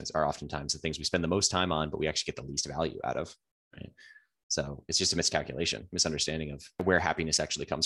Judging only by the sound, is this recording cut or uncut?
cut